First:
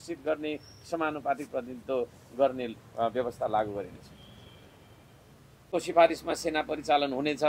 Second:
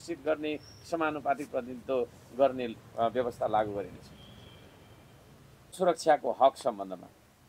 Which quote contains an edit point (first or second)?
first